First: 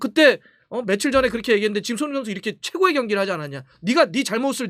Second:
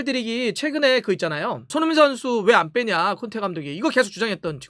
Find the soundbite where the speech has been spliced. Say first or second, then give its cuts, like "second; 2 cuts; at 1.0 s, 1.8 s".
second; 1 cut; at 1.6 s